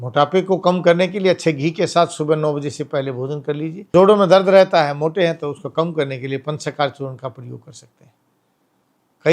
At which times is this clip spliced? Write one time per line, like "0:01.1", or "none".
0:03.9